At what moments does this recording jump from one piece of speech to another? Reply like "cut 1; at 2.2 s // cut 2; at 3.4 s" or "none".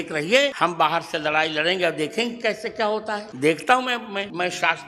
none